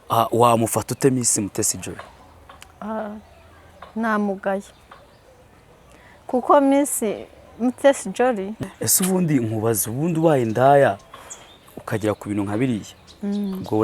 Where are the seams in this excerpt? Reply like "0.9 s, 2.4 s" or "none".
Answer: 8.6 s

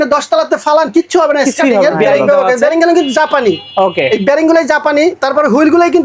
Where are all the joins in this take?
2.0 s

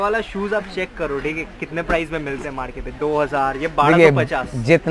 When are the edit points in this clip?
none

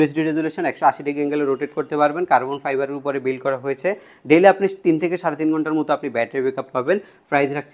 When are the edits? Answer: none

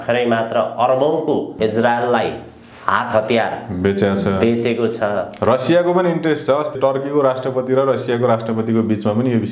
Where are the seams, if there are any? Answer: 1.5 s, 6.7 s

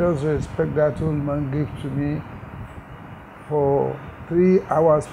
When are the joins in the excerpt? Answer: none

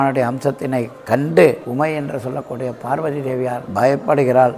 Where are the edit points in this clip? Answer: 1.6 s, 3.6 s

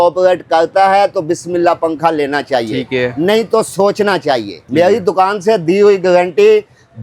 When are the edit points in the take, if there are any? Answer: 4.6 s

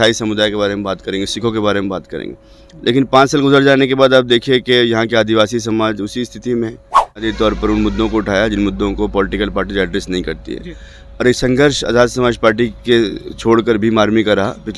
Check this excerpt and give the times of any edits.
7.3 s

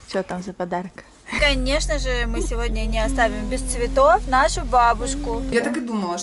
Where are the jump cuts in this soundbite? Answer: 1.3 s, 5.5 s

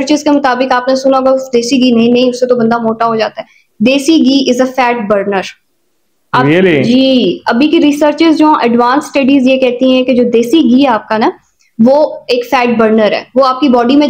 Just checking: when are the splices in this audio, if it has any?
none

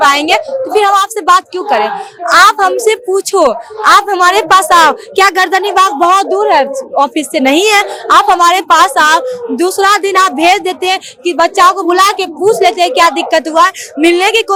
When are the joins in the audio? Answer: none

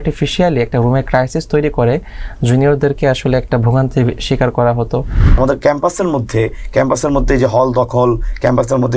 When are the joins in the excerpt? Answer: 5.3 s

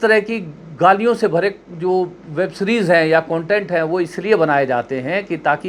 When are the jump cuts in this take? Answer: none

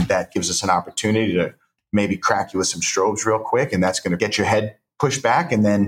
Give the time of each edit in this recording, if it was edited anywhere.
4.2 s

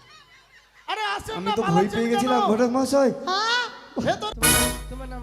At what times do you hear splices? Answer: 4.3 s

